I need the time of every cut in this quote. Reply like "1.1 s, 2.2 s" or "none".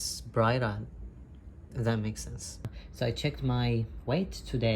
2.7 s